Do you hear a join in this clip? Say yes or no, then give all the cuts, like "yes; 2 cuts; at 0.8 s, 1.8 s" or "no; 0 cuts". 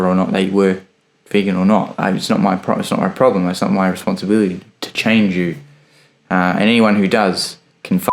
no; 0 cuts